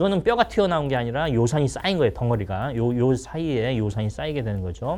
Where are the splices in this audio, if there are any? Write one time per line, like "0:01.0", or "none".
none